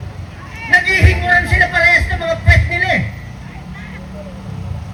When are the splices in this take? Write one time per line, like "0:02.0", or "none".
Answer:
none

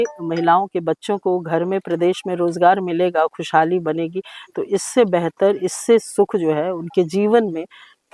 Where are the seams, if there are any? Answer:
none

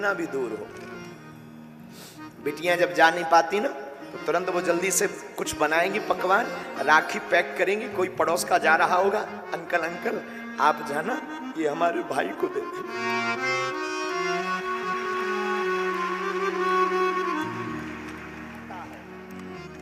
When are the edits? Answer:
none

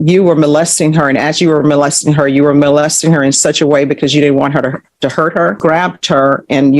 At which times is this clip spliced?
0:05.6

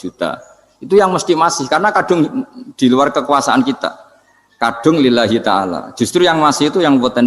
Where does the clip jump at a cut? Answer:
none

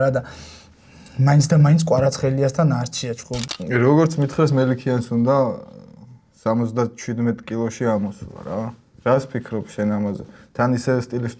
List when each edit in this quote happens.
0:03.4

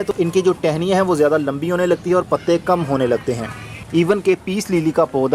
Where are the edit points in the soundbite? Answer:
0:03.8

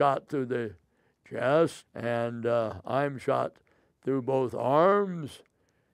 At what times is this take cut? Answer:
0:01.9

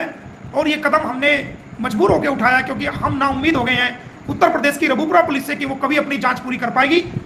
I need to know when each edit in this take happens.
none

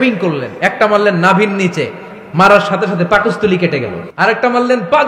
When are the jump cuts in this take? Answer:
0:04.0

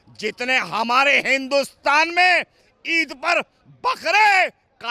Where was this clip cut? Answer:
none

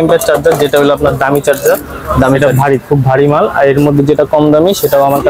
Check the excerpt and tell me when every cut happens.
none

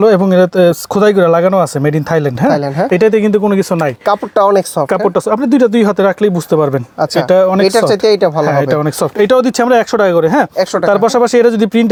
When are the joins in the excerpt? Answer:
none

